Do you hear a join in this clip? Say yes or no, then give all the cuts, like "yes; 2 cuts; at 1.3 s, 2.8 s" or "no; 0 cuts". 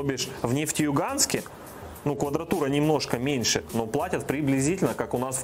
no; 0 cuts